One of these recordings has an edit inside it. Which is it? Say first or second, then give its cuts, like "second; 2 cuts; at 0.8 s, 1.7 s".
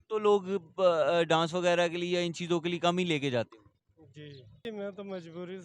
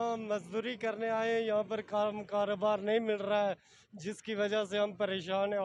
first; 1 cut; at 4.6 s